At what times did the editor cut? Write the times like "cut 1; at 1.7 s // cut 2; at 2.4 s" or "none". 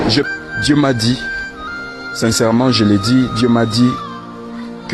none